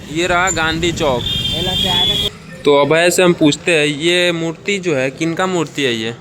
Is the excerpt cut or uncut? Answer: cut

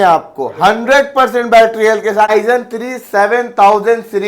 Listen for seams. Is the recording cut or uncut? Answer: cut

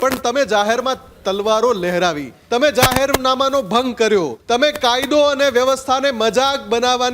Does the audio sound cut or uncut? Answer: cut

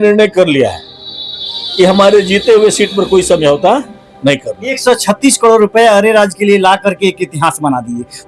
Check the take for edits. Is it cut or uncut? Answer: cut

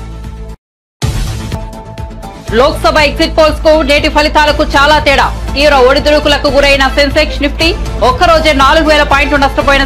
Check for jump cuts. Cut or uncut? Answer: cut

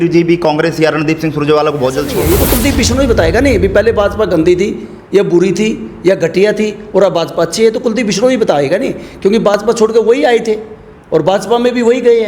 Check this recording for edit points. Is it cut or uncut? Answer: cut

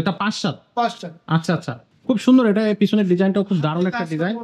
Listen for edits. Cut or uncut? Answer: cut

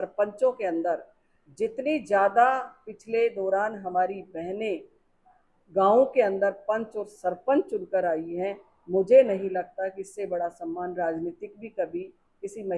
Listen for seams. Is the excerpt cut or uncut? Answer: uncut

